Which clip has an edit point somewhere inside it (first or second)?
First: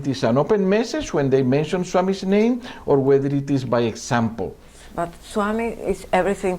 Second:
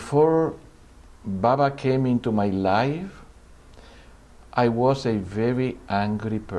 first